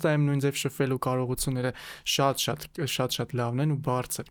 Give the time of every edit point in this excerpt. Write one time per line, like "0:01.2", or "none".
none